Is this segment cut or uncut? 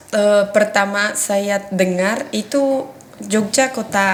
uncut